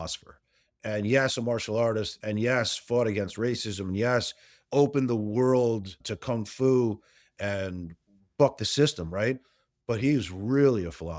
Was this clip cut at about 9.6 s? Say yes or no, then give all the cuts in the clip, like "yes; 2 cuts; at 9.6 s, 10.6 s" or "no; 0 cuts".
yes; 1 cut; at 9.6 s